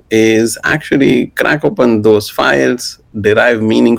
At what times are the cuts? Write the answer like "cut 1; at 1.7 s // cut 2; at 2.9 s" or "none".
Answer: none